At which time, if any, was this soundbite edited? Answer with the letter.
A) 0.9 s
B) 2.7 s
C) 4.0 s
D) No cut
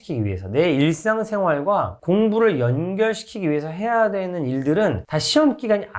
D